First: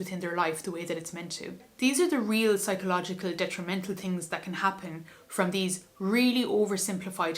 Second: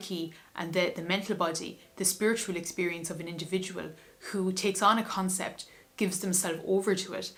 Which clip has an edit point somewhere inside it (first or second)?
first